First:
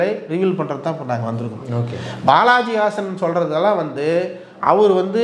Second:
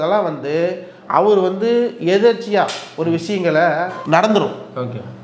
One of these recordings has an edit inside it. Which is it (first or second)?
second